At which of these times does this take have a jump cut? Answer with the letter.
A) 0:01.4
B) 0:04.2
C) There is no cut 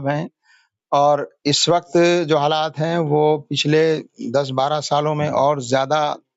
C